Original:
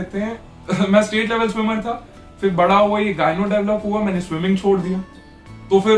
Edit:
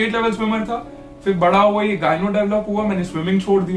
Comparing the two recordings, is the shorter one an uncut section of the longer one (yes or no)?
yes